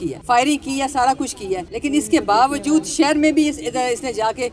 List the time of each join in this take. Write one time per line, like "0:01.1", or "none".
none

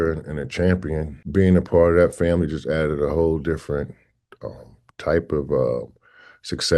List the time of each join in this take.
0:01.2

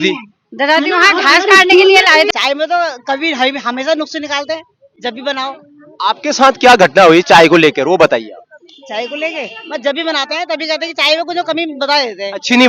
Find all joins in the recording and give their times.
0:02.3

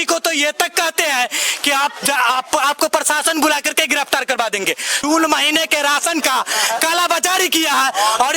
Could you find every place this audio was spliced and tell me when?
0:04.9

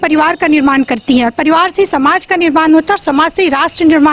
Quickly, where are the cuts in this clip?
none

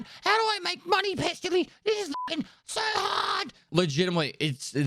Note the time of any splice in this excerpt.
0:03.6

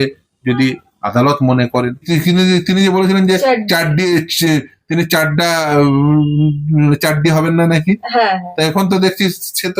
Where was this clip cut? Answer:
0:02.1

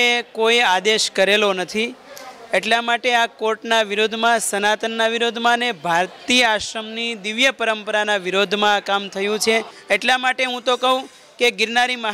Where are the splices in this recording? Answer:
0:09.7

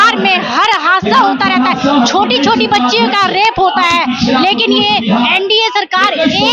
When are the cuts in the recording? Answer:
none

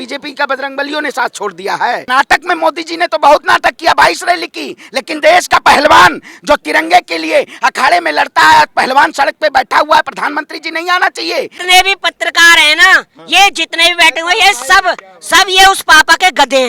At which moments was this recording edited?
0:02.1
0:11.6

